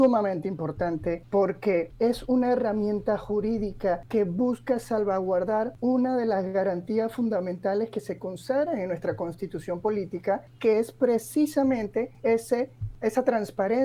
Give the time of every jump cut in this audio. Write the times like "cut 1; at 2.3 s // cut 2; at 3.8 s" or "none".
cut 1; at 1.2 s // cut 2; at 1.9 s // cut 3; at 4.0 s // cut 4; at 5.7 s // cut 5; at 10.5 s // cut 6; at 12.1 s // cut 7; at 12.8 s